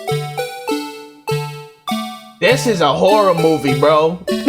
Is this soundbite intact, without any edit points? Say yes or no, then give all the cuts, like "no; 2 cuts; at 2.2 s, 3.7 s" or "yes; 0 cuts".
no; 1 cut; at 0.9 s